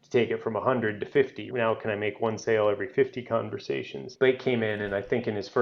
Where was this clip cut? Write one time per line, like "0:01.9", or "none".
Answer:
0:01.4
0:04.1